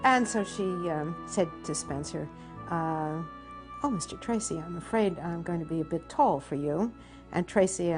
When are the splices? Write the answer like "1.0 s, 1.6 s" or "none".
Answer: 1.5 s